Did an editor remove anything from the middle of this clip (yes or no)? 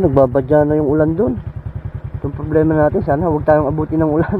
no